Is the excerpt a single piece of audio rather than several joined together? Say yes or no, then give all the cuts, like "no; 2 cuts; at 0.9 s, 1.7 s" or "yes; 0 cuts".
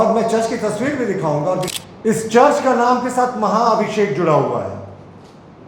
no; 1 cut; at 1.7 s